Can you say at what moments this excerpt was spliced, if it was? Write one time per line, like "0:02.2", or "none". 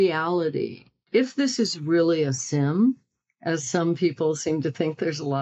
0:00.9